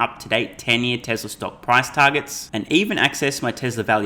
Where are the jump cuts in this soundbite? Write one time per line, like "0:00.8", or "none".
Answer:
none